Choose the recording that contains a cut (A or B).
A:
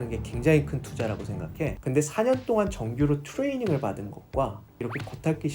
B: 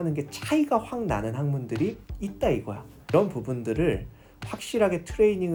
A